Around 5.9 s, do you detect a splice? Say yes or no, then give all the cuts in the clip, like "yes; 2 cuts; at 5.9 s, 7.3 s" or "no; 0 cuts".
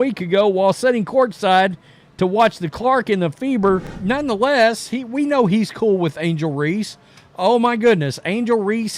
no; 1 cut; at 3.9 s